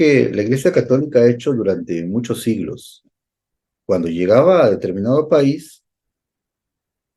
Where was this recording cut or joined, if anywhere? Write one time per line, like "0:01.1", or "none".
none